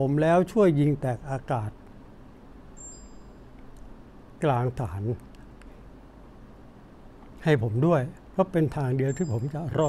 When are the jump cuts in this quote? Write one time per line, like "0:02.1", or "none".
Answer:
none